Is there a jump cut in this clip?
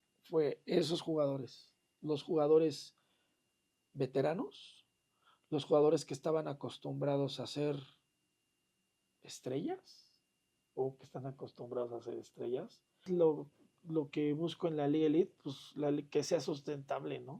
yes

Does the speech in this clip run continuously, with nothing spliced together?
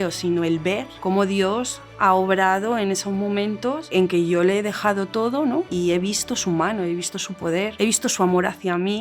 no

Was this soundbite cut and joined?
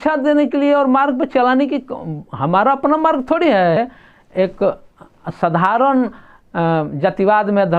yes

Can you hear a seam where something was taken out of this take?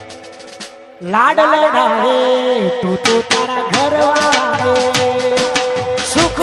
yes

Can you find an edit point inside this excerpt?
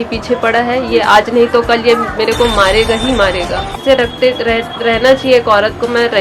yes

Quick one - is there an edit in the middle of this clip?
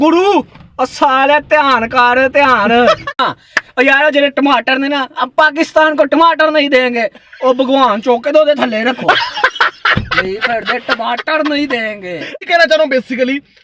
yes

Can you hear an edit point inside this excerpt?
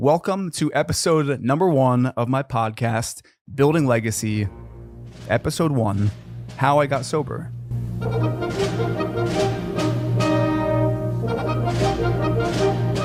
no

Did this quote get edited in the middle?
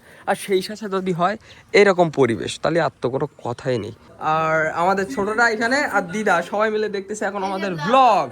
yes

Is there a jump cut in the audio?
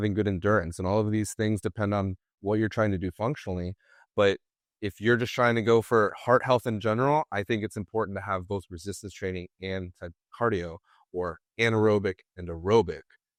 no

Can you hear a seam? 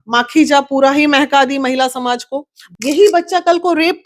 yes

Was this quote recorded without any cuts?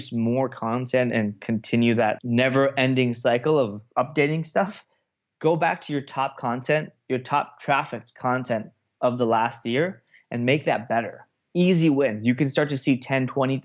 no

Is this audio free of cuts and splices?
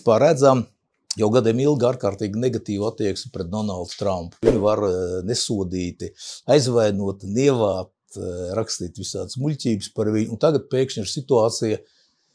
no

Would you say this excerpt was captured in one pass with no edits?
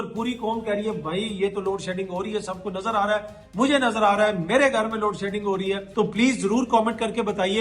no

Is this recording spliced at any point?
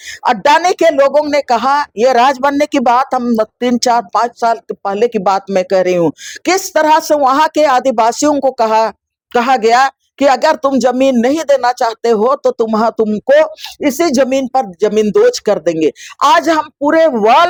no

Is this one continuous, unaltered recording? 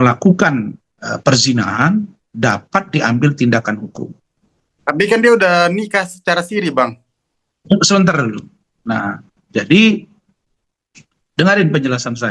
yes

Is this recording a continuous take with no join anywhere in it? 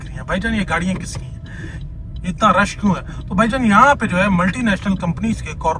yes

